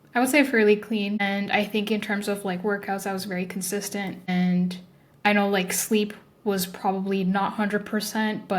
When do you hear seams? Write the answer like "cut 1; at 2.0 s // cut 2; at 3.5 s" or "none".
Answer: cut 1; at 1.2 s // cut 2; at 4.3 s